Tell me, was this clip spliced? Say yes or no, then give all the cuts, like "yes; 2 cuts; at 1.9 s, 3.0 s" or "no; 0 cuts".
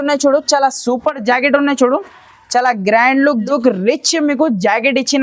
yes; 1 cut; at 3.7 s